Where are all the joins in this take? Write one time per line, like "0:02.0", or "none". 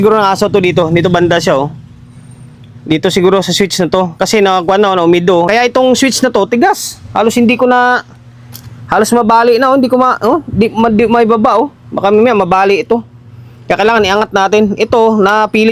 0:05.5